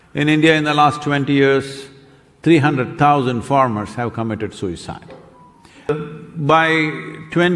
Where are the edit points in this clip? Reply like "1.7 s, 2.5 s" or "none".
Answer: 5.9 s